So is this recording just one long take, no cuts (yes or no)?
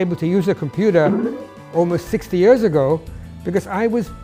yes